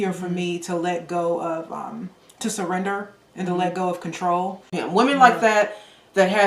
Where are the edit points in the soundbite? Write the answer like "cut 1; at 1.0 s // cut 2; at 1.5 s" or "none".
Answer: cut 1; at 4.7 s